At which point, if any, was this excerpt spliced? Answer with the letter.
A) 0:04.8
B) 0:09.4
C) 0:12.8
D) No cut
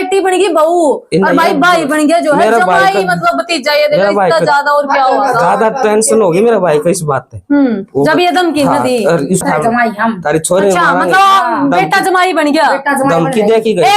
B